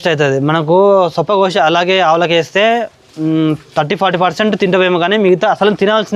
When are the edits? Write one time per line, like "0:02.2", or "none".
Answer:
none